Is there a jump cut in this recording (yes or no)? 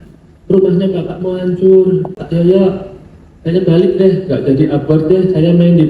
yes